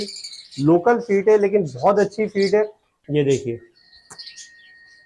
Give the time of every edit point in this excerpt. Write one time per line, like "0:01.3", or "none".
0:02.9